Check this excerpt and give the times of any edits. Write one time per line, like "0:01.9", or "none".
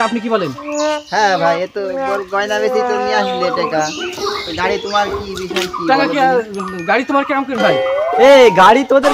none

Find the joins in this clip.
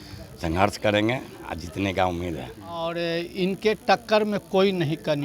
0:02.8

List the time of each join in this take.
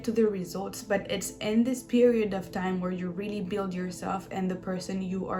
none

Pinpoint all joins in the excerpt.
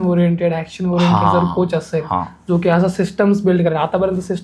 none

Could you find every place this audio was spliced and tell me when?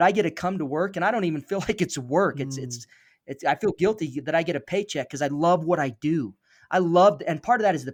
none

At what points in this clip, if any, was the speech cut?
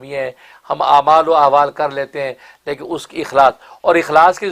none

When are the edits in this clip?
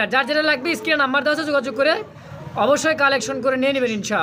none

